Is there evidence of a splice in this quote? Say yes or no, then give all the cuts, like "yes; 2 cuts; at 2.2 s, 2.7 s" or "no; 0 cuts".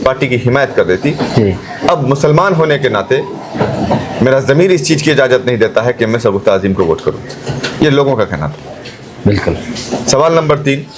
no; 0 cuts